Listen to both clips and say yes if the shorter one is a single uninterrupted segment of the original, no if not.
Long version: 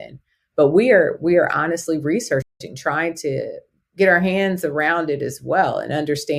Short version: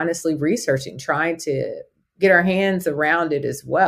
no